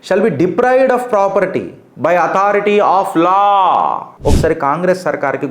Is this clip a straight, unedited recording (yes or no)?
no